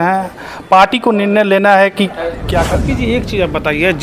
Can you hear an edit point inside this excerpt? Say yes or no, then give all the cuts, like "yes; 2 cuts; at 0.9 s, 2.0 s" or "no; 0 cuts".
yes; 1 cut; at 2.5 s